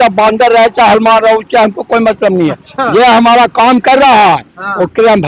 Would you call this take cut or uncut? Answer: uncut